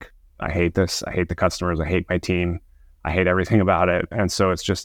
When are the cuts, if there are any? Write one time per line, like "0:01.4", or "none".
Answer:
none